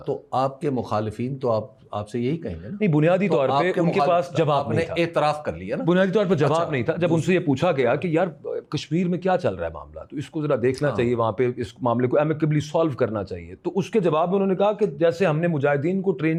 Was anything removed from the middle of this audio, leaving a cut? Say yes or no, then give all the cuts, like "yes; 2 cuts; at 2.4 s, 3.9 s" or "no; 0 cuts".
no; 0 cuts